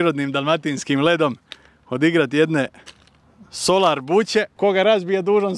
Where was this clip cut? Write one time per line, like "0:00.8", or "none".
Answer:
0:04.5